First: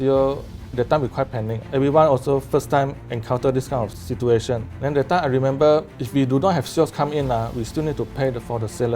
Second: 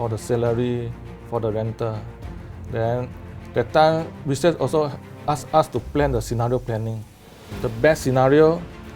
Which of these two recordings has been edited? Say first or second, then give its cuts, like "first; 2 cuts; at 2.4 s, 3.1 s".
first; 4 cuts; at 0.7 s, 1.6 s, 4.7 s, 6.0 s